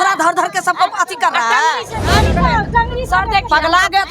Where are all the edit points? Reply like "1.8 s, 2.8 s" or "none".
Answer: 2.1 s